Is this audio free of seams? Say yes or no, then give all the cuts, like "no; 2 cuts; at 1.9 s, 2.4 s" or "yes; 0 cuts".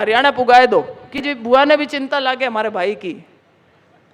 no; 1 cut; at 1.1 s